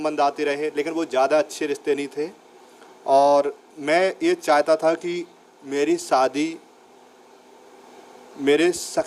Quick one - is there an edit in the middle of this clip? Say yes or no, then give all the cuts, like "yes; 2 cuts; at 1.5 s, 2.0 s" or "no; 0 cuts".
no; 0 cuts